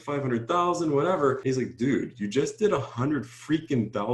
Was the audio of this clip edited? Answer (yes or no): yes